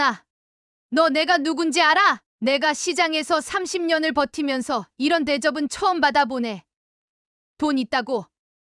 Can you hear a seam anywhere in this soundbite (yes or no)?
yes